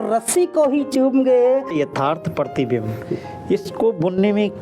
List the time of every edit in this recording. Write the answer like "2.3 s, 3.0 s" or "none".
1.7 s